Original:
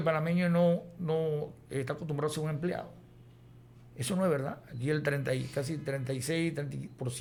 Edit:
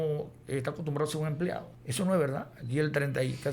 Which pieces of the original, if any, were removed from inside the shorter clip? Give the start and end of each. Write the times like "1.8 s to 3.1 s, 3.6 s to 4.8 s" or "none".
3.0 s to 3.9 s